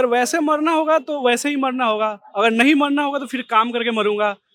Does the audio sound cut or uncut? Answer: uncut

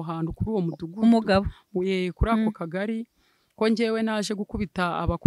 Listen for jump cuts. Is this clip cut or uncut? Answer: uncut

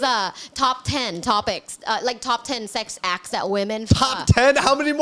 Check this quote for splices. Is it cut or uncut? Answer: uncut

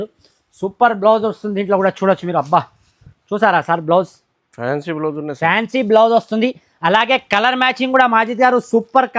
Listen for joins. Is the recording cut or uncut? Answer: uncut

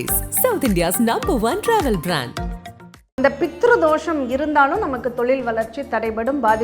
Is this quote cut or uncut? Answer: cut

